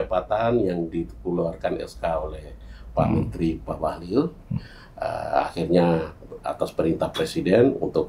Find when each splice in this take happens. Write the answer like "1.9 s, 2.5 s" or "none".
none